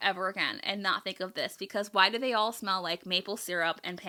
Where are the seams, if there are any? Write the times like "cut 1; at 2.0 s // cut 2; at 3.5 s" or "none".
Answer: none